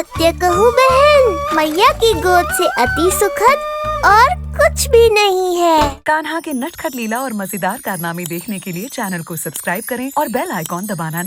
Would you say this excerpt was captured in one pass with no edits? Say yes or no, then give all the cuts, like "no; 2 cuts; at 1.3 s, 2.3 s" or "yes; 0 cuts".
no; 1 cut; at 5.9 s